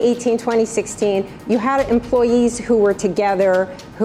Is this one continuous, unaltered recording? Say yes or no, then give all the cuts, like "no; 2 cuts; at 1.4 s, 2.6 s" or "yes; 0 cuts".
yes; 0 cuts